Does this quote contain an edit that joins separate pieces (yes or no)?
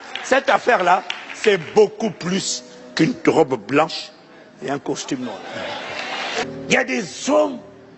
yes